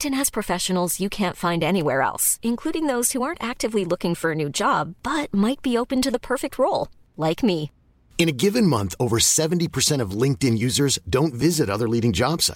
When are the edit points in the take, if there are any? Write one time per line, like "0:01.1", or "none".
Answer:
none